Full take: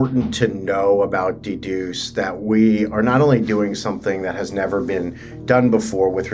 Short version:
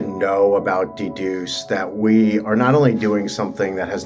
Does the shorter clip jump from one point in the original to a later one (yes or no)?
no